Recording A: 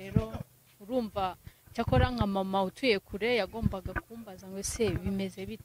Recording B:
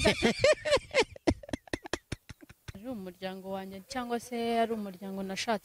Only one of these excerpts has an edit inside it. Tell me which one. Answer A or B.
B